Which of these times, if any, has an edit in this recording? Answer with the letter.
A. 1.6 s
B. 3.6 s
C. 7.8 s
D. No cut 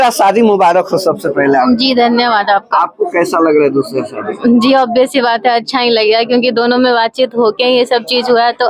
D